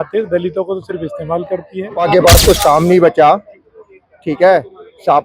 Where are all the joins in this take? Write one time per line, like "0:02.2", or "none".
0:02.0